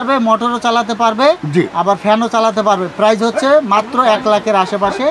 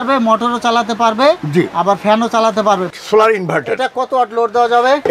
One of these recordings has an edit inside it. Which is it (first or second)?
second